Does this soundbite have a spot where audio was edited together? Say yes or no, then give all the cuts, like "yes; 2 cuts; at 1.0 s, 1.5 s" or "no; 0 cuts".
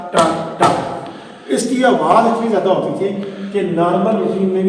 no; 0 cuts